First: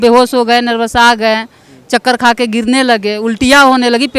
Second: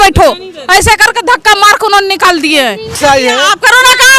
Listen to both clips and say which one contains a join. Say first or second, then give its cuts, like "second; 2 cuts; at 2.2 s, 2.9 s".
second; 1 cut; at 3.0 s